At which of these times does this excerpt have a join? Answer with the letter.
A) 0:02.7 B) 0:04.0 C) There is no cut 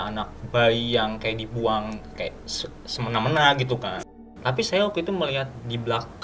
B